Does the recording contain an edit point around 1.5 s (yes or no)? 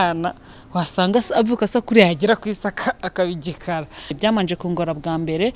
no